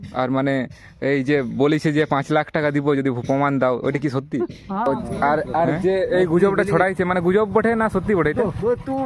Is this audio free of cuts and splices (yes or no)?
no